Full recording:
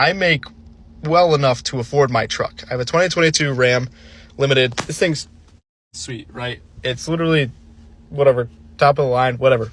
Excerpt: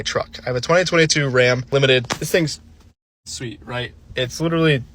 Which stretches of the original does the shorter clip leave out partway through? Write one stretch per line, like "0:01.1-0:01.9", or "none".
0:03.9-0:04.3